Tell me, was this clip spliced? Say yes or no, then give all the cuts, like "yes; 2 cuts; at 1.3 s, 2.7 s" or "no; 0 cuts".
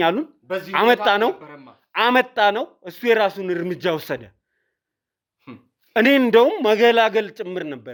no; 0 cuts